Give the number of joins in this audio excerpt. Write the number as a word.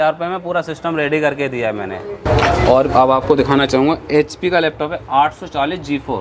one